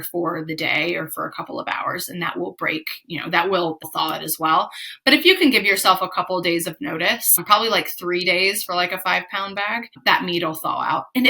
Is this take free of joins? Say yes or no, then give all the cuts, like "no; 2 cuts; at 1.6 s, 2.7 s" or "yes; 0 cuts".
no; 3 cuts; at 3.8 s, 7.4 s, 10.0 s